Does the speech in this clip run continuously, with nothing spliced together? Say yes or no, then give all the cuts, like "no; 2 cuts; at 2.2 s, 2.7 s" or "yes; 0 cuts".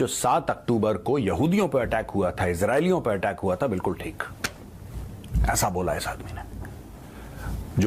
yes; 0 cuts